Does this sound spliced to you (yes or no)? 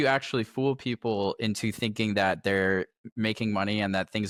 no